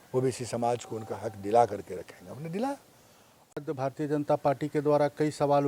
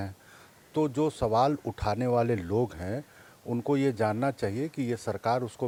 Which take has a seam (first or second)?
first